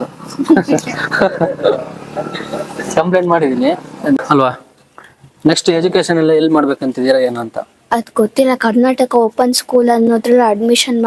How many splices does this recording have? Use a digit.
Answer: 1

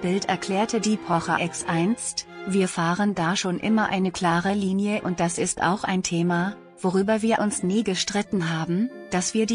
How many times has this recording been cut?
0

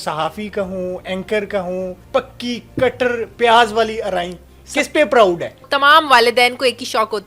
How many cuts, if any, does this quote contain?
2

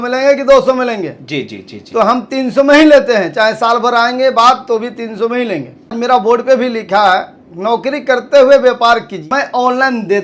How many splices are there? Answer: 2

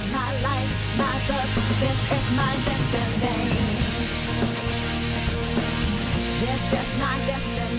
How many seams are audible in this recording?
0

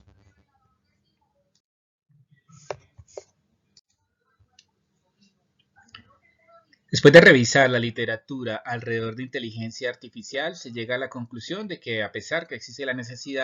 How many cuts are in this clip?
0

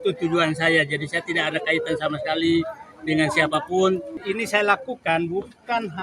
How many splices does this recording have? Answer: 1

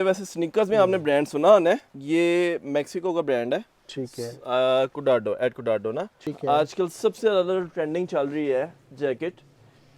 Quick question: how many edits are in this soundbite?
2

